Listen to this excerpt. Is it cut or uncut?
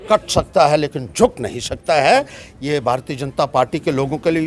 uncut